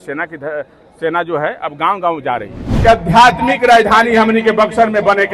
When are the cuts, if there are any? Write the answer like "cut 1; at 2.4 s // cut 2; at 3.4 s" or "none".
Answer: cut 1; at 2.7 s